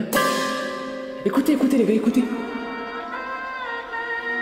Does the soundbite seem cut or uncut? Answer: uncut